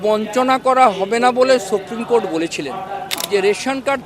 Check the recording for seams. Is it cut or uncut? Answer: cut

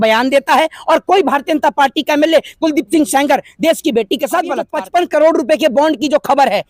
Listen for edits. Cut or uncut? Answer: cut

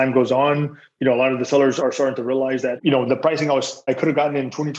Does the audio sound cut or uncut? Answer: cut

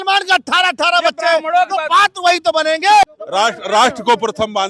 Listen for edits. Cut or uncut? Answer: cut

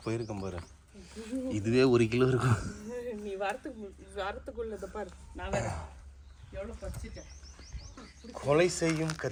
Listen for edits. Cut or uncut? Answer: uncut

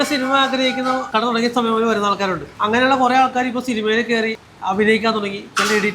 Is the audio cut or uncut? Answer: cut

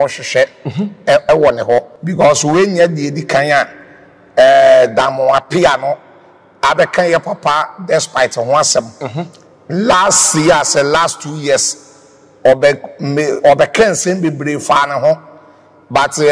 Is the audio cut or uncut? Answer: cut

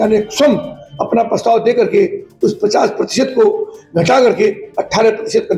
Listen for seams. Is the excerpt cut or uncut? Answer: uncut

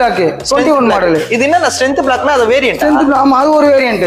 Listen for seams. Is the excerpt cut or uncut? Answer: uncut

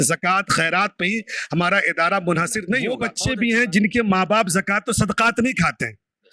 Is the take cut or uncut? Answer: cut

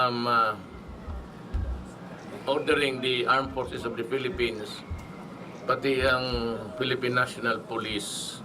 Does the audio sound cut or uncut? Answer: cut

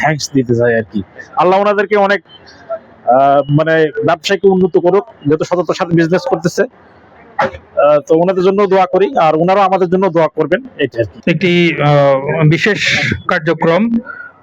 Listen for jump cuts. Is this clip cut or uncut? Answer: uncut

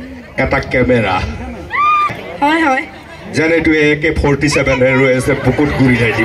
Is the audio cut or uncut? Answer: cut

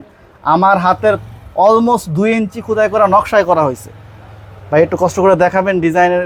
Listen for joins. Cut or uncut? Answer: uncut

